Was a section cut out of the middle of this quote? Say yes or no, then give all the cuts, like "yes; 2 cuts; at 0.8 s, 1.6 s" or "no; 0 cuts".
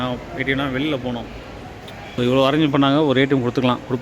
no; 0 cuts